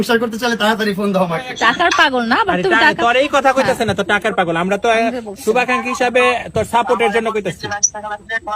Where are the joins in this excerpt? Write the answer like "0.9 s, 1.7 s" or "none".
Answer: 1.5 s